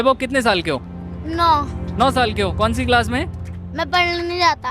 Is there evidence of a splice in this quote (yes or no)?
no